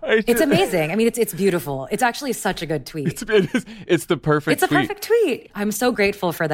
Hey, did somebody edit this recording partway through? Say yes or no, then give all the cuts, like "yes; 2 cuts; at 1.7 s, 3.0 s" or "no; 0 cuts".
yes; 1 cut; at 5.4 s